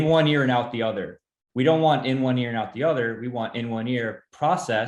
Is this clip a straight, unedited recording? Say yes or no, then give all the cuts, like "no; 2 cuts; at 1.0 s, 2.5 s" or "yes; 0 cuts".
yes; 0 cuts